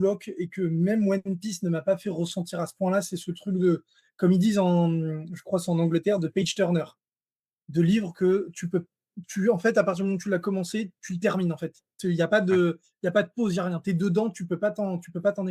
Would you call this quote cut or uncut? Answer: uncut